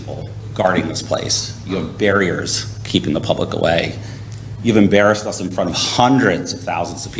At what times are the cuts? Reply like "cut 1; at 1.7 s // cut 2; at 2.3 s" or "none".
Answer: none